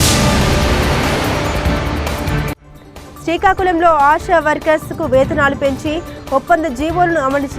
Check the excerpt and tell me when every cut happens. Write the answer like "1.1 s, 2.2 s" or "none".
2.0 s